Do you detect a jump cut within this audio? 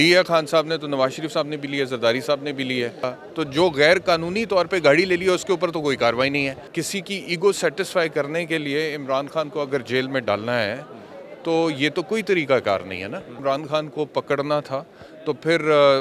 yes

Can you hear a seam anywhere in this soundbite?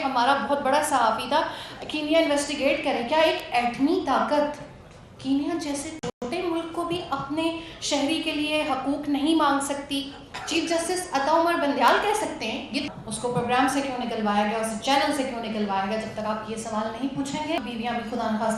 yes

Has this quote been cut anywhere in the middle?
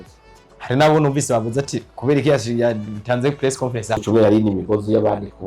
yes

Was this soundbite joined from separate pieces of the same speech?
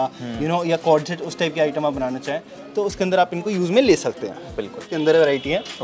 yes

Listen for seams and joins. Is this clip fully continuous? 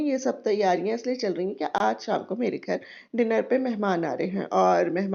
yes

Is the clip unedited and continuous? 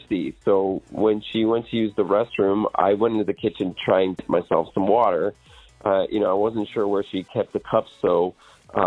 no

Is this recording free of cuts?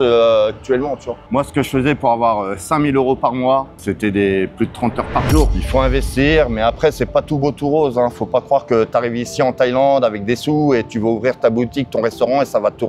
no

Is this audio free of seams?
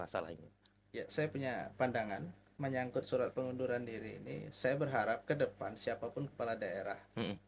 no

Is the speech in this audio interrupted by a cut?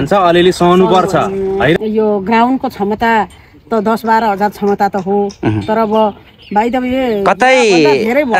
yes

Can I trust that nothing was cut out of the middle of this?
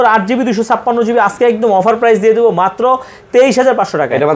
yes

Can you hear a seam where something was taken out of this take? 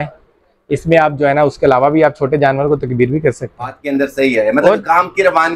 yes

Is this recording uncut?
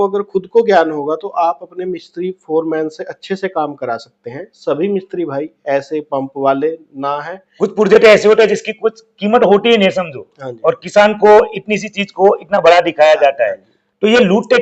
no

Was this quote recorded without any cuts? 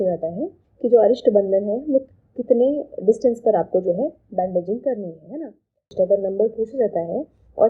no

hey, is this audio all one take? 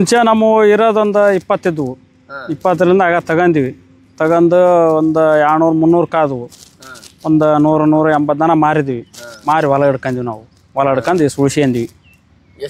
yes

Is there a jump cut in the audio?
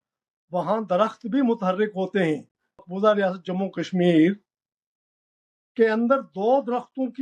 yes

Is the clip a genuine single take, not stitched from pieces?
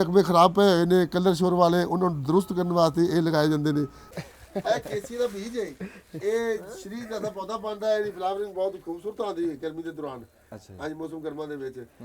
no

